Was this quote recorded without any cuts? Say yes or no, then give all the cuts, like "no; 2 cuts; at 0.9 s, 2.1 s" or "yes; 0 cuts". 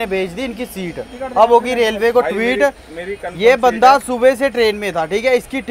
yes; 0 cuts